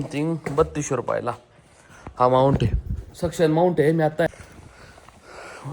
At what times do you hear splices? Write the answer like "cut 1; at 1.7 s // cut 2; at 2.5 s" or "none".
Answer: cut 1; at 4.3 s